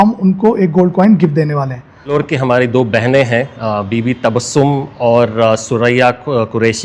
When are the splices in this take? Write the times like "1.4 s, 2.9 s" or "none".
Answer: 2.1 s